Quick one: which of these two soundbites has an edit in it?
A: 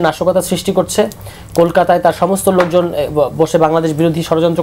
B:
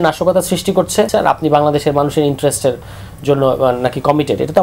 B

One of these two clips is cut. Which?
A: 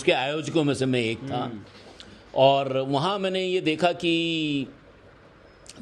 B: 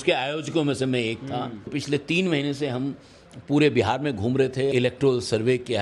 B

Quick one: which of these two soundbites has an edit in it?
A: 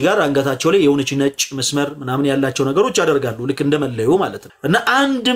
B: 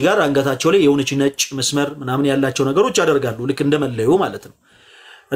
A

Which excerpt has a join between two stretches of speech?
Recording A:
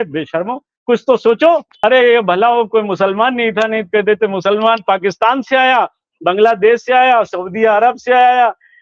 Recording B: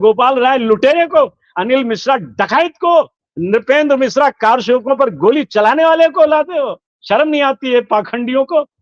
A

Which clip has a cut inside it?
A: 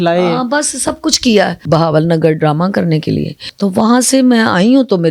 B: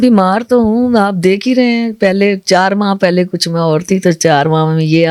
A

